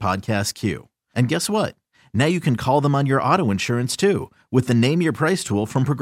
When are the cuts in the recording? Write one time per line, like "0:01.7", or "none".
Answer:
none